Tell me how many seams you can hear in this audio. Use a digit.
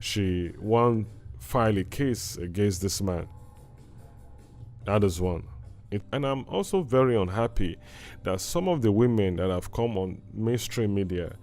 1